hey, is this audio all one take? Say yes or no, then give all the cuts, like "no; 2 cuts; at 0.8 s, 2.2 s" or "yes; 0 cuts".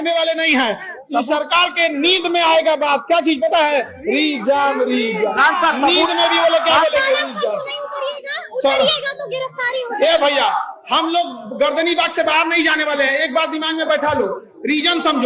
yes; 0 cuts